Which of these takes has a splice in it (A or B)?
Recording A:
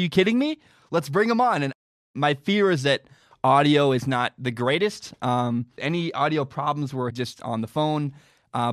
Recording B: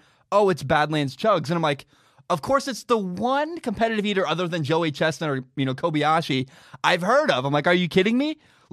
A